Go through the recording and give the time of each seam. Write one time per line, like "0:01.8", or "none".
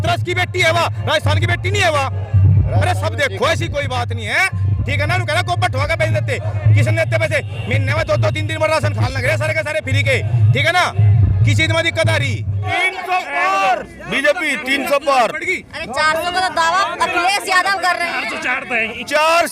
0:12.6